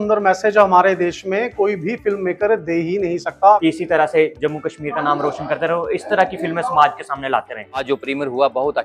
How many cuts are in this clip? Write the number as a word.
two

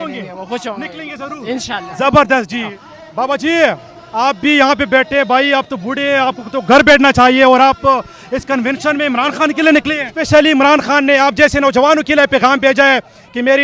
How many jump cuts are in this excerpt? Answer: two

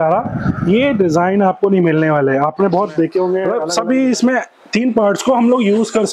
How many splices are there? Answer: one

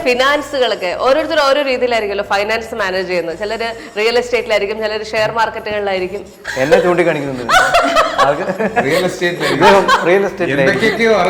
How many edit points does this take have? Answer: zero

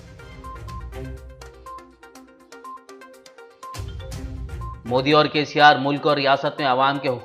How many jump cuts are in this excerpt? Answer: one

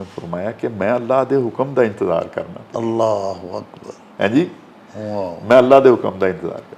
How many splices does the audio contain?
zero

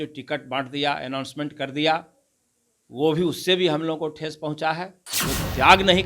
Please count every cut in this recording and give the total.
one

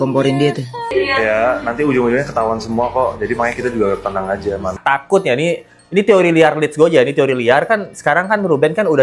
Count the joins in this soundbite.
two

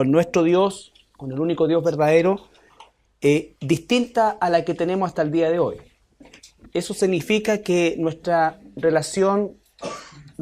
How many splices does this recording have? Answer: zero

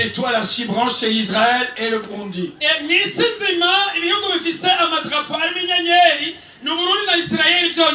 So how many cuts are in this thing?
zero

